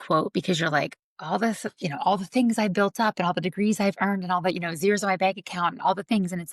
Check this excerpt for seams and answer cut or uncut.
uncut